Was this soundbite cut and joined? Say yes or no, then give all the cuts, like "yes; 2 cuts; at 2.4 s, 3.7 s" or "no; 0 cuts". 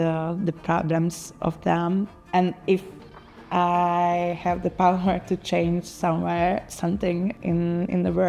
yes; 1 cut; at 2.2 s